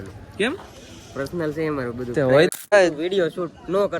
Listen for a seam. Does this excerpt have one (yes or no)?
yes